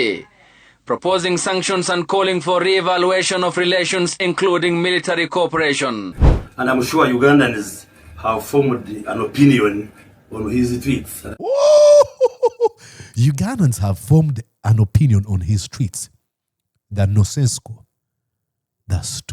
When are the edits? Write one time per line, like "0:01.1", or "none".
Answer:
0:06.2